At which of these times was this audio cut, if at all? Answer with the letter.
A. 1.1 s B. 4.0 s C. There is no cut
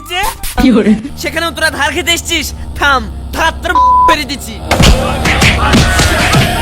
A